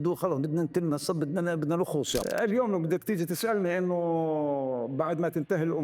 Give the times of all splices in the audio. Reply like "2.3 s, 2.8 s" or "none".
2.2 s